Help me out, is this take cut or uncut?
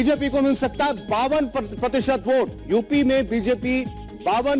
uncut